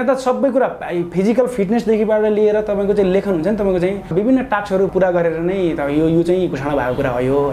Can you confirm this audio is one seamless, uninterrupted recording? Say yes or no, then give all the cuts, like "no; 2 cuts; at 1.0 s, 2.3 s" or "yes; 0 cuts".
no; 2 cuts; at 4.1 s, 4.9 s